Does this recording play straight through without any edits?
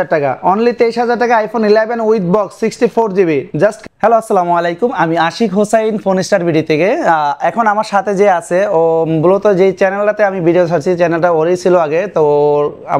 yes; 0 cuts

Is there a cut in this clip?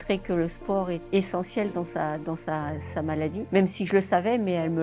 no; 0 cuts

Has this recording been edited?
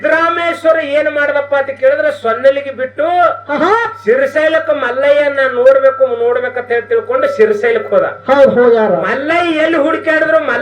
no; 0 cuts

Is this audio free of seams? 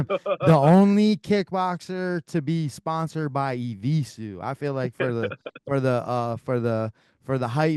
yes; 0 cuts

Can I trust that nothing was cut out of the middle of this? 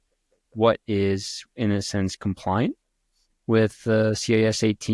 yes; 0 cuts

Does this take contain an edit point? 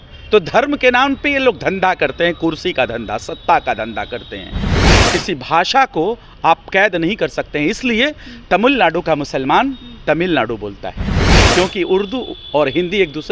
yes; 2 cuts; at 4.9 s, 11.4 s

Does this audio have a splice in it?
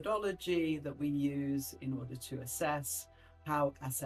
no; 0 cuts

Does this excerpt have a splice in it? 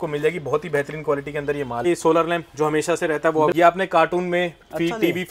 yes; 2 cuts; at 1.9 s, 3.5 s

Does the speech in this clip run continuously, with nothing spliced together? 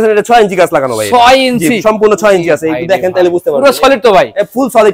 yes; 0 cuts

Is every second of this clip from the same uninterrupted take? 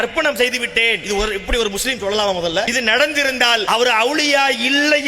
no; 3 cuts; at 1.0 s, 2.7 s, 3.6 s

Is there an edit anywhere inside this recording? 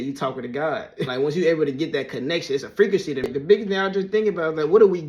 yes; 2 cuts; at 1.1 s, 3.2 s

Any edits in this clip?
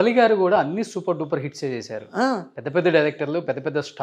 no; 0 cuts

